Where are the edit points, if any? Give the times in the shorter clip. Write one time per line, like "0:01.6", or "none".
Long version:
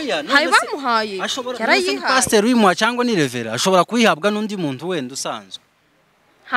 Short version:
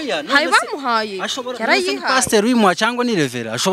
none